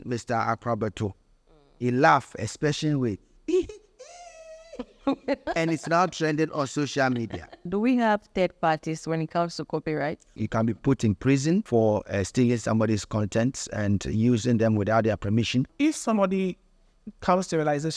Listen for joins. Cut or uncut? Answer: cut